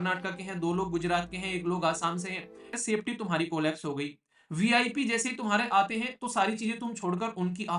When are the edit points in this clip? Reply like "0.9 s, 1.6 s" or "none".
2.8 s